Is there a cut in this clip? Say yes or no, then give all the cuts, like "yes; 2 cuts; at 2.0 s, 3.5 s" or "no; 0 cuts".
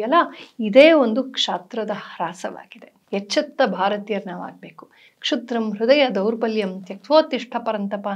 no; 0 cuts